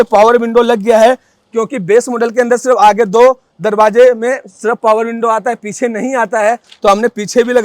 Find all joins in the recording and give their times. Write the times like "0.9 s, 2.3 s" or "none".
none

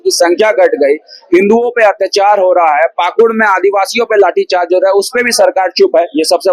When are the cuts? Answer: none

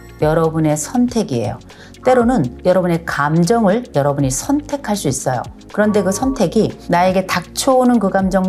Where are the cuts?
none

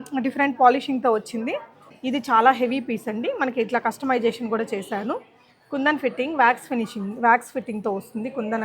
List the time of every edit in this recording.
1.9 s

